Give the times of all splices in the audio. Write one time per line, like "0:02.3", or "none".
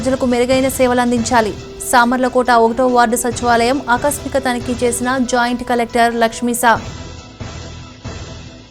none